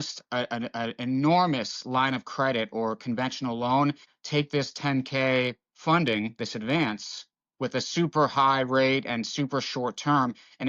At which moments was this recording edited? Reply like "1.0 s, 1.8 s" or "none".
4.1 s